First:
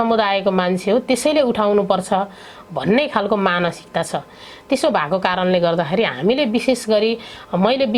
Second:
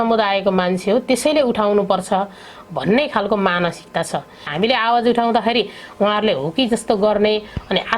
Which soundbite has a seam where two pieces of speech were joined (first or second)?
second